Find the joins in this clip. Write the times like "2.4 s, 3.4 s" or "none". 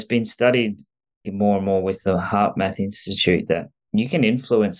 1.3 s